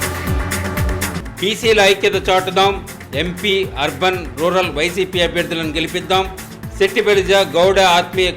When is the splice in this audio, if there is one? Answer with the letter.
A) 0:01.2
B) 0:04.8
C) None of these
A